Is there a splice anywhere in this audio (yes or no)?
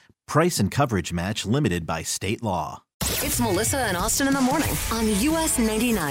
yes